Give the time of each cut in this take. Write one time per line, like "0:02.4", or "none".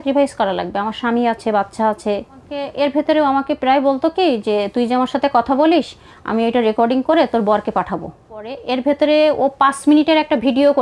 0:02.7
0:08.6